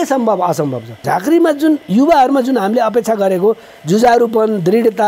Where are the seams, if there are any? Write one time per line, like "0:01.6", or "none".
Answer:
0:01.0